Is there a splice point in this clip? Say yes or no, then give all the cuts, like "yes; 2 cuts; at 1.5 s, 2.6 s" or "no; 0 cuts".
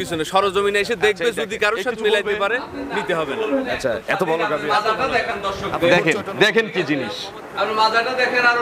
yes; 1 cut; at 4.7 s